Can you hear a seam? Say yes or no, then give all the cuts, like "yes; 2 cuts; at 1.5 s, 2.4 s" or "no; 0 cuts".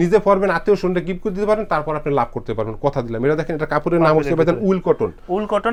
no; 0 cuts